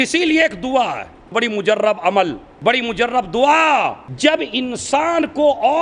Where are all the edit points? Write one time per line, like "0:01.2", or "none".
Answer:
0:01.3
0:02.5
0:04.1